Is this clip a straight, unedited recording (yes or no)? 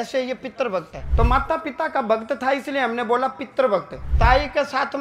no